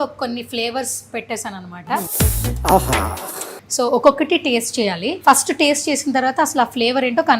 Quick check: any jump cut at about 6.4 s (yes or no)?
no